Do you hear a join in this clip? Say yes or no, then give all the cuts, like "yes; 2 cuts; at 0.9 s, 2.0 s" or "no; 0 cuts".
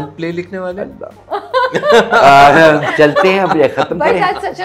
no; 0 cuts